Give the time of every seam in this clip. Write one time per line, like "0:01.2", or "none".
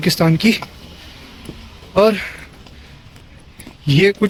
none